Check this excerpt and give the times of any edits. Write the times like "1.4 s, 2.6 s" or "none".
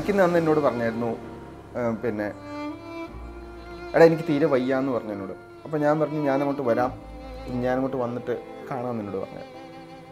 none